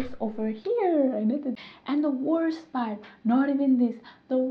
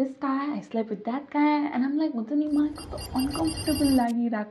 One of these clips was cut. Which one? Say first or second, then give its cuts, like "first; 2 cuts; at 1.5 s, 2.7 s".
first; 1 cut; at 1.6 s